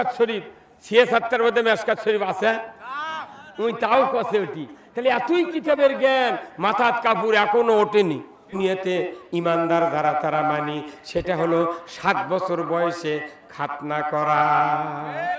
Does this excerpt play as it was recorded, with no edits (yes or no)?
no